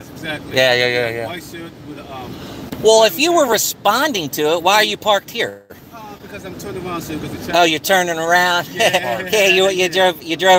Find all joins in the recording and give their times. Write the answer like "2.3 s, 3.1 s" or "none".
2.5 s

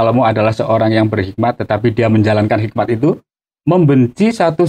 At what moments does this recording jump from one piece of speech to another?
3.3 s

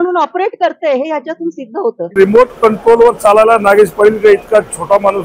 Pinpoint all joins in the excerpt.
2.2 s

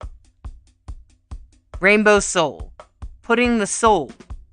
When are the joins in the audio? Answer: 1.5 s

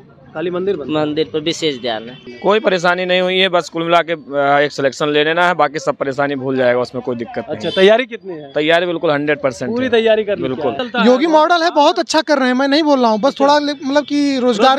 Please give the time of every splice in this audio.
2.2 s, 10.8 s

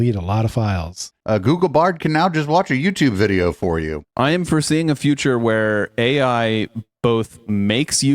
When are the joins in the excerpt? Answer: 1.1 s, 4.0 s

